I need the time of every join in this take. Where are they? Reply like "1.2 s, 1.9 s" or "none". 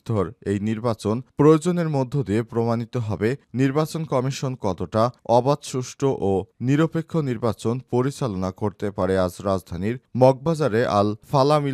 none